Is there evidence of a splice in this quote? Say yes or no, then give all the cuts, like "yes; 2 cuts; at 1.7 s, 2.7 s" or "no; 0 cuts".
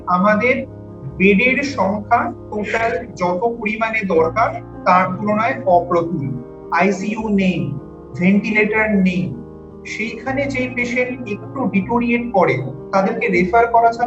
yes; 1 cut; at 6.5 s